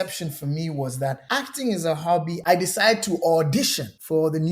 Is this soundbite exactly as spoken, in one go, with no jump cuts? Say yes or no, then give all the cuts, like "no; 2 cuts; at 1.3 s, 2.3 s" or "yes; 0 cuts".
no; 1 cut; at 2.3 s